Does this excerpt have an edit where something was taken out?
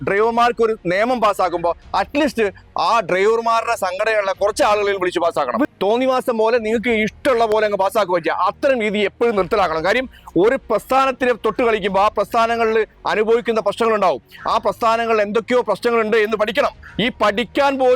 yes; 1 cut; at 5.7 s

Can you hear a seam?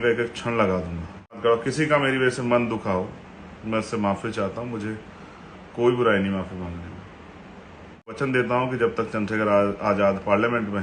yes; 2 cuts; at 1.3 s, 8.1 s

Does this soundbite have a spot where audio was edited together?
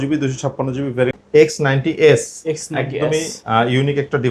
yes; 1 cut; at 1.2 s

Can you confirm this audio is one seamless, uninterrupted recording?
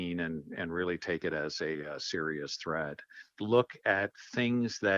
no; 1 cut; at 3.3 s

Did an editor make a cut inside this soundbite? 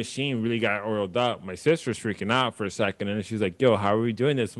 no; 0 cuts

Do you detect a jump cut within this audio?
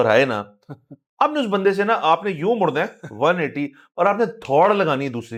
no; 0 cuts

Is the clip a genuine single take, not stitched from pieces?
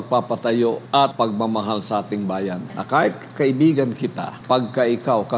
no; 3 cuts; at 1.0 s, 2.7 s, 4.3 s

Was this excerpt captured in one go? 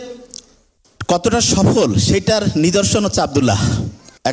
yes; 0 cuts

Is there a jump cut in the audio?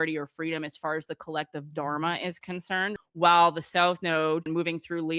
yes; 2 cuts; at 2.9 s, 4.5 s

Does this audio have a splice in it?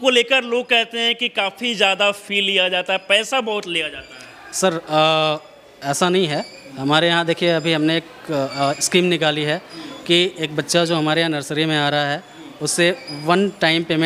no; 0 cuts

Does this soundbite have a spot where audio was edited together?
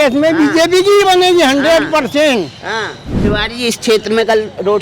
yes; 1 cut; at 3.1 s

